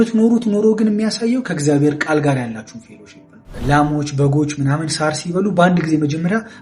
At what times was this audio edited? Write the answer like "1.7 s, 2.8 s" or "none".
3.5 s